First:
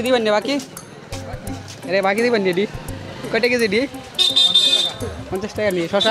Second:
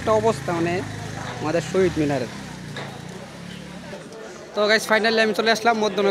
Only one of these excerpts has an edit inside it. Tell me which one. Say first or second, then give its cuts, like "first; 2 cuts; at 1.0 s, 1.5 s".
second; 1 cut; at 4.0 s